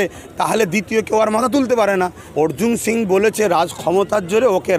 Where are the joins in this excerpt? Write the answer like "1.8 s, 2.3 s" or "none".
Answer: 2.2 s